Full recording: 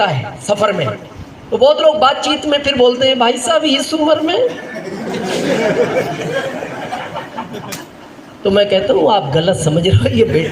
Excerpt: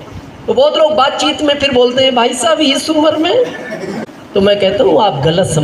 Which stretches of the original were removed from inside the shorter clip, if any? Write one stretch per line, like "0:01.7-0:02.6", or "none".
0:05.0-0:08.1